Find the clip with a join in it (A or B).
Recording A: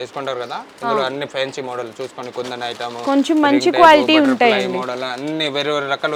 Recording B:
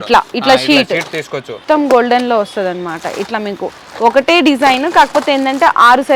B